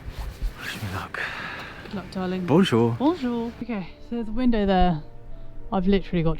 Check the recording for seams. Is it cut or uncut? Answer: cut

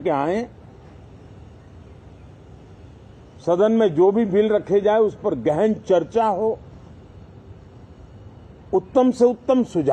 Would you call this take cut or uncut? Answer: uncut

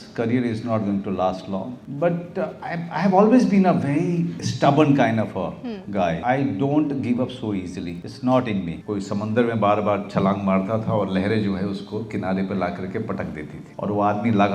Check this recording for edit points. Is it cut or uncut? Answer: cut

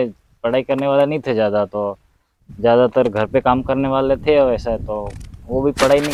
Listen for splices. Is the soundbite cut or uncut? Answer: uncut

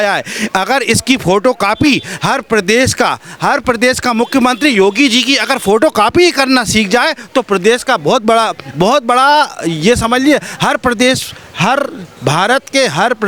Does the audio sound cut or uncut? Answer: uncut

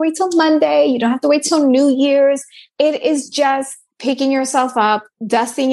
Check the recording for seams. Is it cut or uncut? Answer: cut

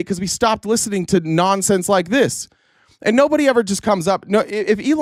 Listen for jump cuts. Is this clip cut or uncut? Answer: uncut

